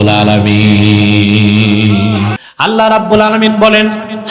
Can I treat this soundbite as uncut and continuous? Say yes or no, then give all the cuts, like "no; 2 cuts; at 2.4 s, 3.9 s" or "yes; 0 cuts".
no; 1 cut; at 2.4 s